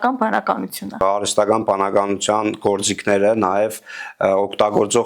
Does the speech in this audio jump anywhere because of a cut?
yes; 1 cut; at 1.0 s

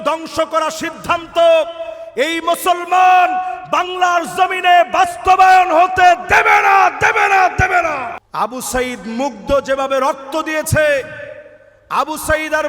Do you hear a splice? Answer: yes; 1 cut; at 8.2 s

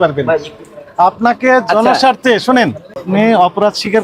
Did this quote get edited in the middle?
yes; 1 cut; at 3.0 s

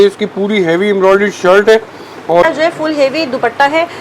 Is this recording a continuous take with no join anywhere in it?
no; 1 cut; at 2.4 s

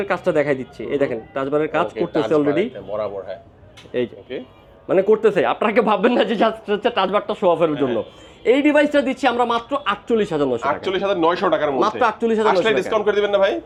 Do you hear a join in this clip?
no; 0 cuts

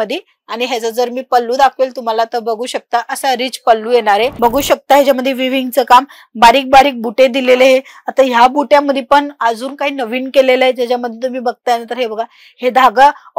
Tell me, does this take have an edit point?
yes; 1 cut; at 4.3 s

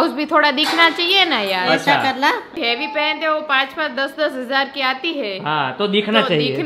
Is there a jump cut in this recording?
yes; 1 cut; at 2.5 s

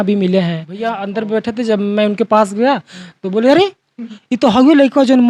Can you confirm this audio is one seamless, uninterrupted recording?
no; 1 cut; at 1.0 s

